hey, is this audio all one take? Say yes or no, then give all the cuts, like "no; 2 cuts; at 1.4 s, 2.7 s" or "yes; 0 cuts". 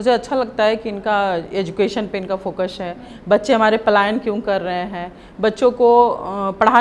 yes; 0 cuts